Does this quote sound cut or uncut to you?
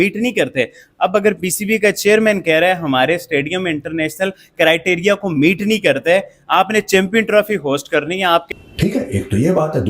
cut